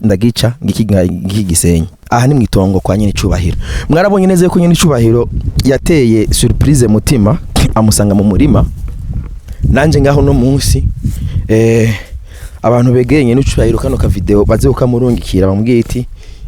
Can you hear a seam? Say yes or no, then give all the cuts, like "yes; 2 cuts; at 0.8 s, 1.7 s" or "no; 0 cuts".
yes; 1 cut; at 2.0 s